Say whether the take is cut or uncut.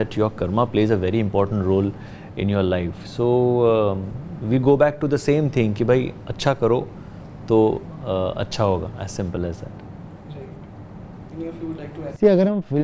uncut